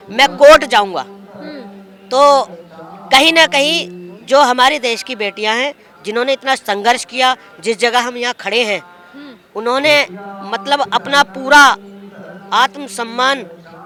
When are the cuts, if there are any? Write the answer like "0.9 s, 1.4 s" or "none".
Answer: none